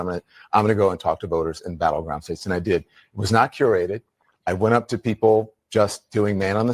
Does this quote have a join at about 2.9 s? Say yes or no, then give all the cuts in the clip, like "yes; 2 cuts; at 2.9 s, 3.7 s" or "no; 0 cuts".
yes; 1 cut; at 2.9 s